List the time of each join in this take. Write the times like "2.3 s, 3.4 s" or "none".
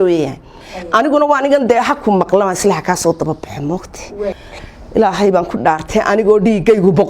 4.4 s

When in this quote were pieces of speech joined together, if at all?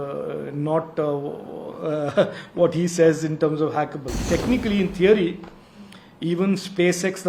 4.2 s

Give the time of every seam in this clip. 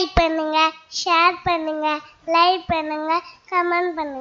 none

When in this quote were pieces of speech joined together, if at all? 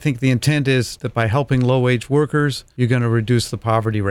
1.0 s, 2.6 s

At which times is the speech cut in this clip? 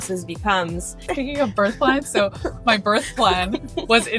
1.1 s

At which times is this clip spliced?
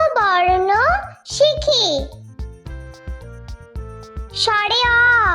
2.3 s, 4.4 s

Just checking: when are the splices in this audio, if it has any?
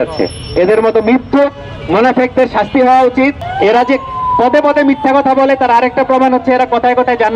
3.4 s

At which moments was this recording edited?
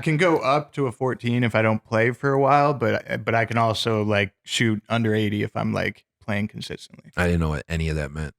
none

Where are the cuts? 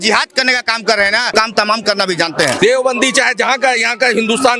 1.3 s, 2.6 s

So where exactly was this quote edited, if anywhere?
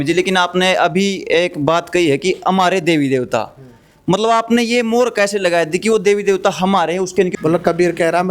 7.3 s

